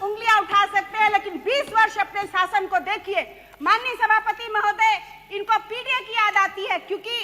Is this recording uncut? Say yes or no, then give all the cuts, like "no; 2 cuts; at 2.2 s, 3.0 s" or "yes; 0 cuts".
yes; 0 cuts